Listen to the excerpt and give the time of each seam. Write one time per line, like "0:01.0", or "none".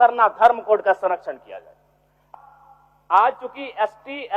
0:02.2